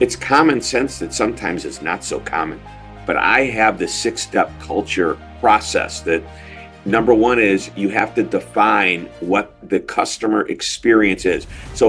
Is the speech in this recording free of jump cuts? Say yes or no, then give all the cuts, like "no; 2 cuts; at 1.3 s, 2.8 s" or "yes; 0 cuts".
no; 3 cuts; at 2.9 s, 5.3 s, 9.6 s